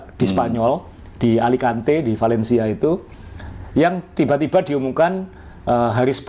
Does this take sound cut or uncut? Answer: uncut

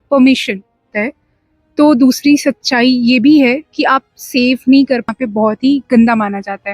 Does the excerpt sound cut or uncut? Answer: cut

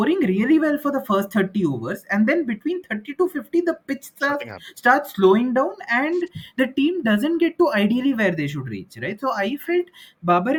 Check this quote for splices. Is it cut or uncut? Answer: uncut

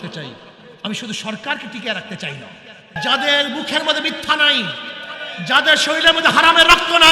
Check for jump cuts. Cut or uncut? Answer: cut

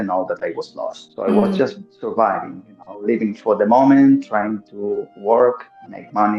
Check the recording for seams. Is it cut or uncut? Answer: uncut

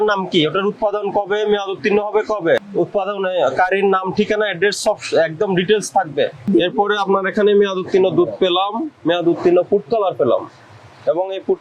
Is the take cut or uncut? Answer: cut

